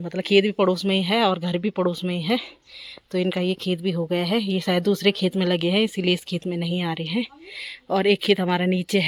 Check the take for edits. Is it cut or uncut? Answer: uncut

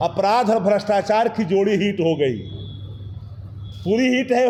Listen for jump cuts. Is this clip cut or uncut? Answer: uncut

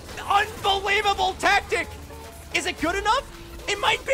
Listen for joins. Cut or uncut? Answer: uncut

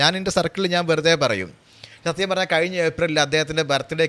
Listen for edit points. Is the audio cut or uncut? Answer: uncut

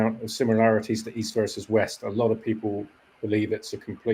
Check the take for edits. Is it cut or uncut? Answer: uncut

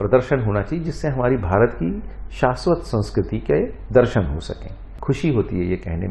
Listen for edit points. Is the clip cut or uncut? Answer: cut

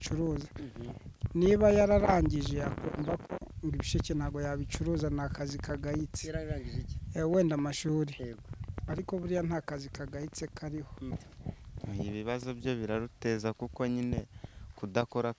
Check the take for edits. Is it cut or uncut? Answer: cut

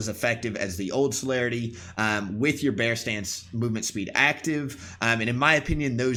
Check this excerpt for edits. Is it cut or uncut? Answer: uncut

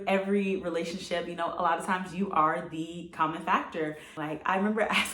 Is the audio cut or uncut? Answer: cut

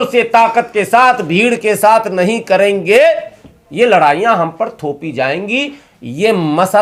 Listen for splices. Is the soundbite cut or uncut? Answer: uncut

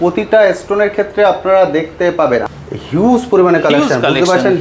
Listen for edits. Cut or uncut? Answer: cut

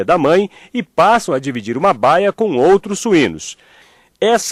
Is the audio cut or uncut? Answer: uncut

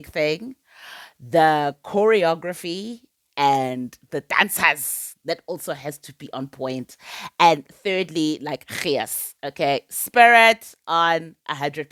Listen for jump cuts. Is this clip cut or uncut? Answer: uncut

